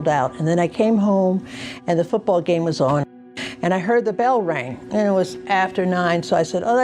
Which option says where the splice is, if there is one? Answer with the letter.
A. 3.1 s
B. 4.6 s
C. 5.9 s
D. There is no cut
A